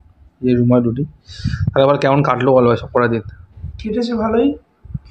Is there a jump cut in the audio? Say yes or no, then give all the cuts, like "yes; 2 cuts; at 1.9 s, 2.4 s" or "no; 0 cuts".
no; 0 cuts